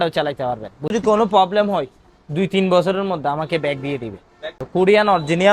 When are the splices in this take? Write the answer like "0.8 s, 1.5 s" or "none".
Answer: 0.9 s, 4.6 s